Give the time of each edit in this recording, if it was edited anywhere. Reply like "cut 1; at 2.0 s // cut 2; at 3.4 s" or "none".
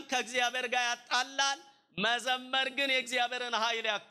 none